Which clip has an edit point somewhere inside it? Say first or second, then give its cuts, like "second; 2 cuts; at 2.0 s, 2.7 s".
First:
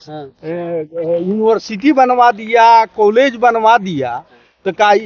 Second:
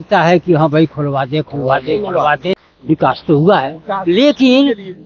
second; 1 cut; at 2.7 s